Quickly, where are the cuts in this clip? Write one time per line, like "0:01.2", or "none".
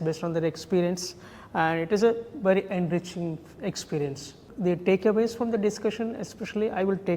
0:04.4